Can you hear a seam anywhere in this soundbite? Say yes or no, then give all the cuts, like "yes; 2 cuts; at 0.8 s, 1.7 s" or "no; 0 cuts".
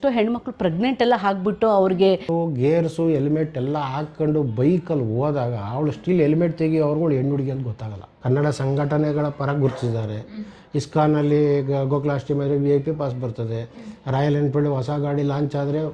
yes; 2 cuts; at 2.3 s, 8.2 s